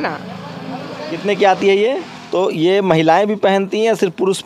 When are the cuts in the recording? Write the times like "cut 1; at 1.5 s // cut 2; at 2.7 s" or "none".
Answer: cut 1; at 2.1 s

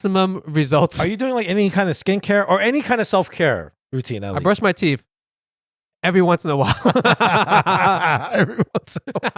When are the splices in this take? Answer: none

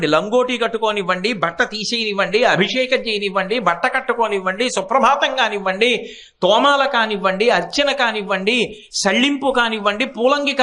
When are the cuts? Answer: none

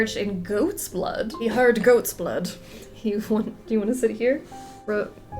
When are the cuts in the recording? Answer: cut 1; at 1.3 s

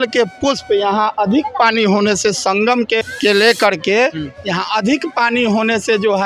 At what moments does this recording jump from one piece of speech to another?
cut 1; at 3.1 s

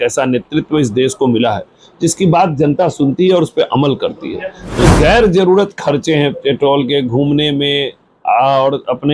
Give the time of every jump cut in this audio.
cut 1; at 4.8 s

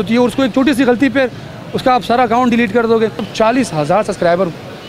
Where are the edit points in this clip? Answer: cut 1; at 3.3 s

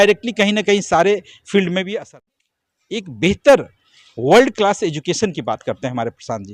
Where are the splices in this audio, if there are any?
cut 1; at 2.3 s

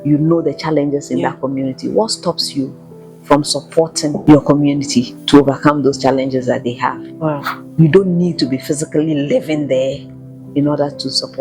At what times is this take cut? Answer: cut 1; at 4.2 s // cut 2; at 5.2 s // cut 3; at 7.5 s

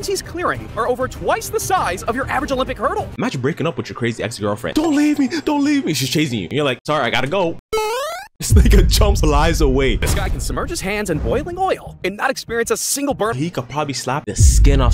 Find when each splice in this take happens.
cut 1; at 3.1 s // cut 2; at 10.1 s // cut 3; at 13.3 s

